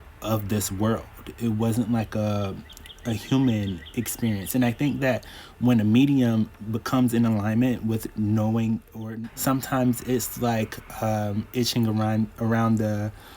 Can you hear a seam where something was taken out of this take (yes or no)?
yes